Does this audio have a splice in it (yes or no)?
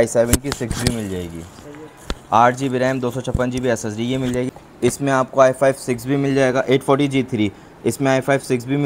yes